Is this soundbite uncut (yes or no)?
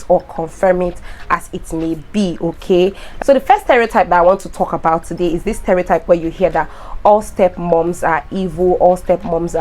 no